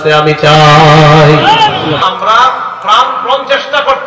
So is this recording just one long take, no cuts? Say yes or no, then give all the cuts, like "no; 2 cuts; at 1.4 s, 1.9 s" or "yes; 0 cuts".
no; 1 cut; at 2.0 s